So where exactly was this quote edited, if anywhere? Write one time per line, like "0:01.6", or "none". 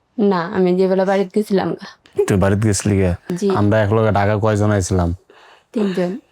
0:03.2